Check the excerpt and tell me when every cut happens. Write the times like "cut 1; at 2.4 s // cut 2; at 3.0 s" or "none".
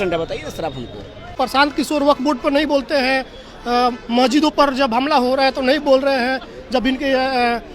cut 1; at 1.3 s